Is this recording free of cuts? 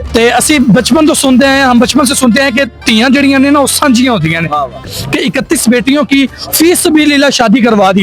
no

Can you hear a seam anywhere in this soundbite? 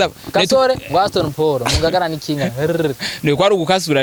no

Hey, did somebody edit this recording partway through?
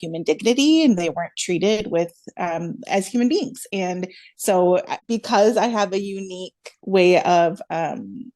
yes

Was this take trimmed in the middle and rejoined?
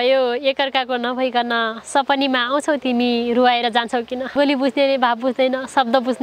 yes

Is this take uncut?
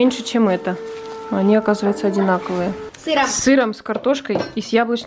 no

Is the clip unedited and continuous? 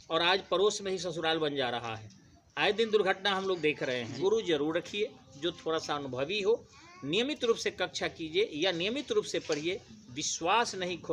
no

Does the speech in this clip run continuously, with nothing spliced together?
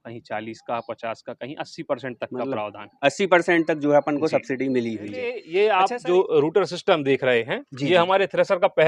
no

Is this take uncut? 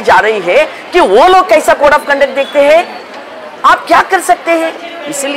yes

